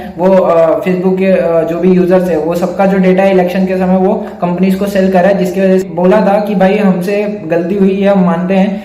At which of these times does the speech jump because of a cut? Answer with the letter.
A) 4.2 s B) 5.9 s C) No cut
B